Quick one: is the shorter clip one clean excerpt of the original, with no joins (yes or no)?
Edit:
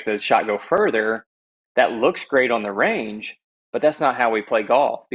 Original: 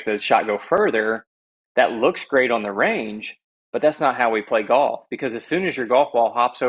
yes